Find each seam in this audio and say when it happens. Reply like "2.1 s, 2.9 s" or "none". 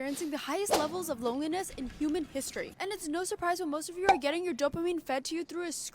none